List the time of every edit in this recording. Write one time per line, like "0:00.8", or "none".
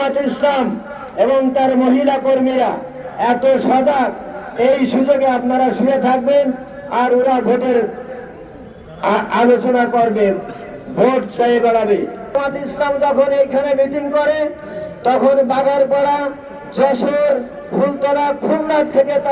0:12.3